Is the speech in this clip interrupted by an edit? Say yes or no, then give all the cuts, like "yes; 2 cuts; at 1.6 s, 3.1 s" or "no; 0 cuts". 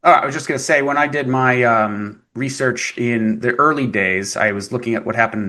no; 0 cuts